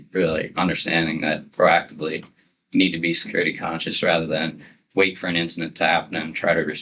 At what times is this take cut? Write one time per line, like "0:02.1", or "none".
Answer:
none

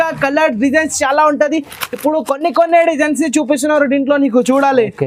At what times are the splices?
none

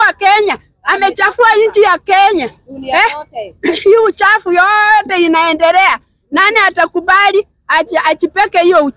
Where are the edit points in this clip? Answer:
none

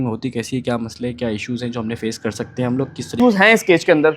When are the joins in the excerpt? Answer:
0:03.0

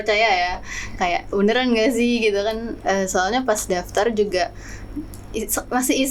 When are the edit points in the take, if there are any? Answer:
none

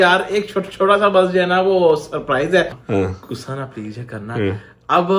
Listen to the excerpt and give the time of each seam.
0:02.8

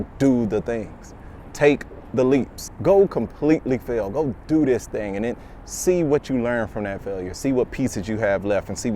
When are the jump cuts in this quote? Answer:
0:02.6

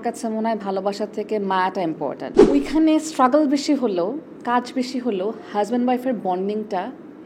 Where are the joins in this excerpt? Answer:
0:02.3

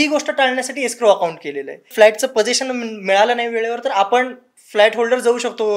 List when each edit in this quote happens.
0:01.9

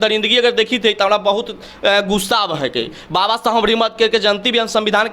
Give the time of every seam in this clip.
none

